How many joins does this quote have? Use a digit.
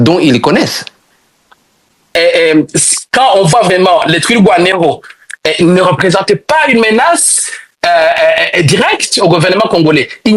1